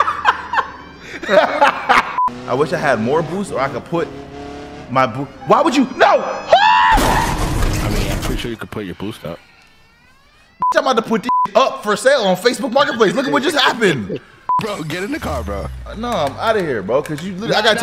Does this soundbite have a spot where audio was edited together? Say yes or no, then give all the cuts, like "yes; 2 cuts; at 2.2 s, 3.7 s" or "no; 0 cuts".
yes; 2 cuts; at 2.1 s, 14.6 s